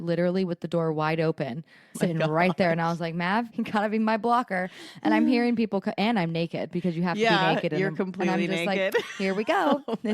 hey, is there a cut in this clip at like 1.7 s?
no; 1 cut; at 3.5 s

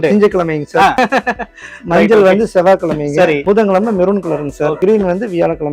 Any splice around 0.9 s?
yes; 3 cuts; at 0.9 s, 3.4 s, 4.8 s

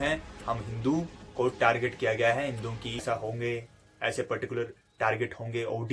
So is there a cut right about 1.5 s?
no; 1 cut; at 3.0 s

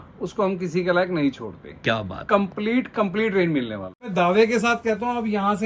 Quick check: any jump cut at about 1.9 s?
no; 1 cut; at 4.1 s

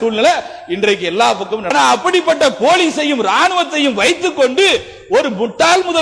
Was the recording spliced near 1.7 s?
yes; 1 cut; at 1.7 s

